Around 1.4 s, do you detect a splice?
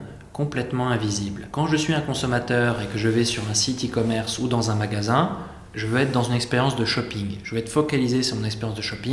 yes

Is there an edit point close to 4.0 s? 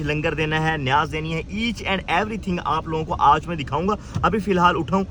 no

